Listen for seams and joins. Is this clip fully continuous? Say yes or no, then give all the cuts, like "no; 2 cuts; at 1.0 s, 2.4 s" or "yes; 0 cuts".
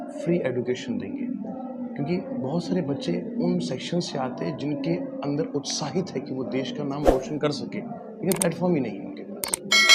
yes; 0 cuts